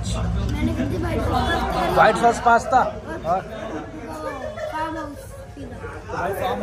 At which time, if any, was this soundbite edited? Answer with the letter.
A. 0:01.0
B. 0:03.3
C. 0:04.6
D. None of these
D